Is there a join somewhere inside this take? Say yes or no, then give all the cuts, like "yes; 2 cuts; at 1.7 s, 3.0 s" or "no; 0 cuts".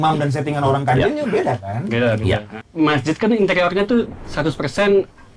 yes; 1 cut; at 2.6 s